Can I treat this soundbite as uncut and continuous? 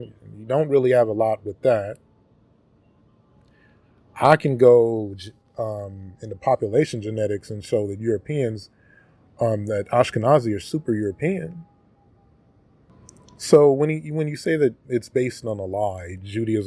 no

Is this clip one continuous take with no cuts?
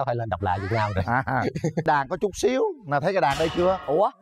no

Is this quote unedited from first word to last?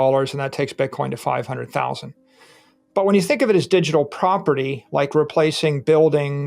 yes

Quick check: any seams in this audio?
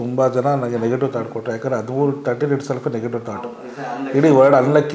no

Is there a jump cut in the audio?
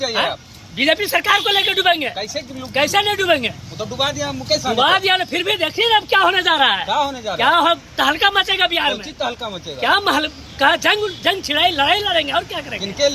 no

